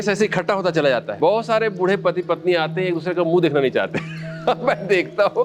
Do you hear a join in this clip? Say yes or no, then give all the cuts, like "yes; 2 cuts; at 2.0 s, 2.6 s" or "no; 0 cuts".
yes; 1 cut; at 1.1 s